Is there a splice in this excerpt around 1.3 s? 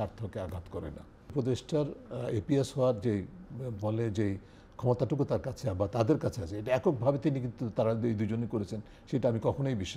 yes; 1 cut; at 1.3 s

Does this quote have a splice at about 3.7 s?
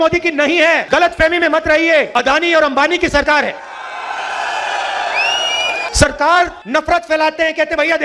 no; 4 cuts; at 0.8 s, 2.1 s, 5.9 s, 6.6 s

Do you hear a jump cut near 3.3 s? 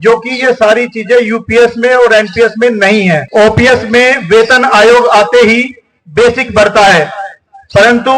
yes; 1 cut; at 3.3 s

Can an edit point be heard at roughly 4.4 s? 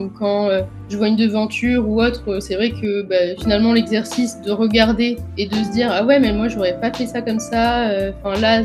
no; 0 cuts

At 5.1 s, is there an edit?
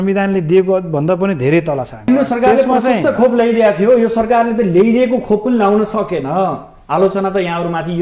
no; 1 cut; at 2.1 s

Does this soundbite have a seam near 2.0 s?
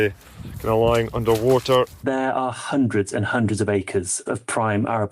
yes; 2 cuts; at 2.0 s, 4.2 s

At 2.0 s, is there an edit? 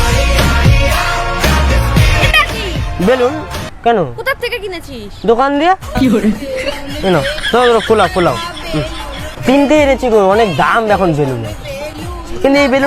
no; 0 cuts

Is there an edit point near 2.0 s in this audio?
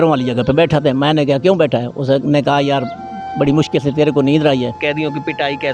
no; 1 cut; at 4.8 s

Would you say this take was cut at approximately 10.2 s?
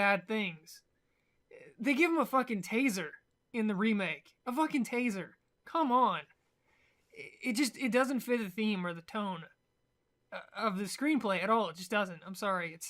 yes; 1 cut; at 10.2 s

